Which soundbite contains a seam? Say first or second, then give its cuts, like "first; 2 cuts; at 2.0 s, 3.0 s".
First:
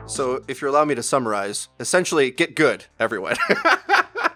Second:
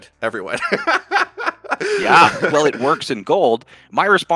second; 1 cut; at 2.5 s